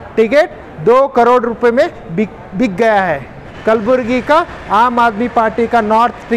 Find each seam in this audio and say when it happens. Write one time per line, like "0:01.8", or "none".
0:03.5